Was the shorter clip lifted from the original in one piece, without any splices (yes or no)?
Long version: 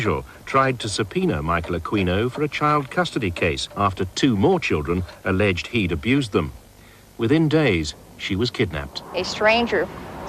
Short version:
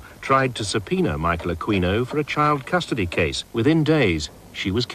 no